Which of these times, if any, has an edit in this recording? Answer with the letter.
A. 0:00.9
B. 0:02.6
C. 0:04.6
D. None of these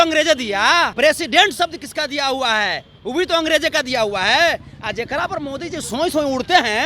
A